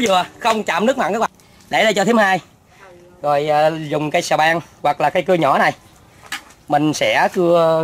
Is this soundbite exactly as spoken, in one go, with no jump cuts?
no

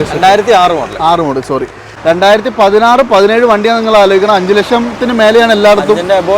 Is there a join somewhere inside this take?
yes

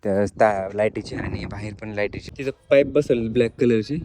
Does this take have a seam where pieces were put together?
yes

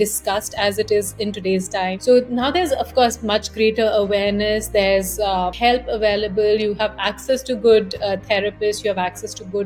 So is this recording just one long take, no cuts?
yes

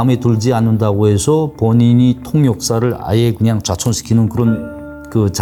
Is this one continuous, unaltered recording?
yes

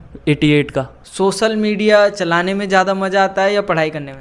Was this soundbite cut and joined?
yes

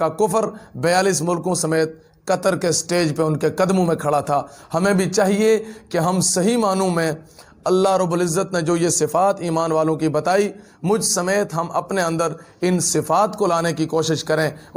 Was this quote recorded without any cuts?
yes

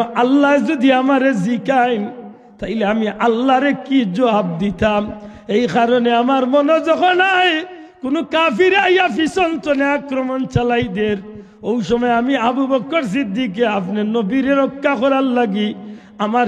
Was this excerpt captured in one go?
yes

